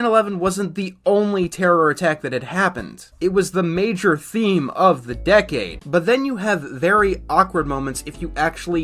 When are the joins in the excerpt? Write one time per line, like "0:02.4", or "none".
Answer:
0:05.8